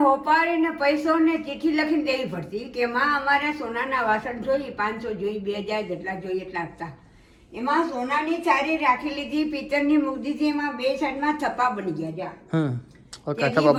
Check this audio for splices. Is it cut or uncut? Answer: uncut